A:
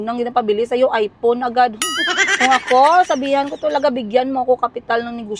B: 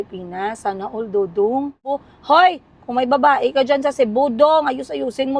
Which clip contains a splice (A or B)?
B